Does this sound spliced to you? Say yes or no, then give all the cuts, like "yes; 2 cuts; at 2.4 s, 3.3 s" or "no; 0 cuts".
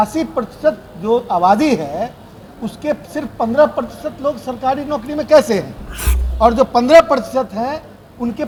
no; 0 cuts